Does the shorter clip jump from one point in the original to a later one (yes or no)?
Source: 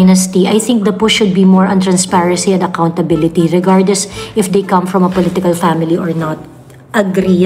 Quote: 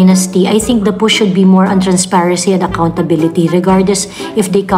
no